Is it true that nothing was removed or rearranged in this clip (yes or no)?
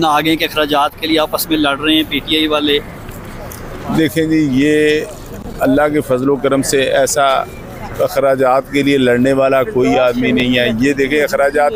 yes